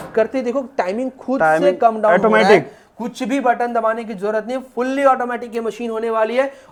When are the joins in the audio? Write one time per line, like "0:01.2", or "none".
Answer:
none